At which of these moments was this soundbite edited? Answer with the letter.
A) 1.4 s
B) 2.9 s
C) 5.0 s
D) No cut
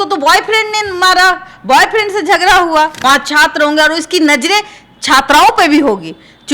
B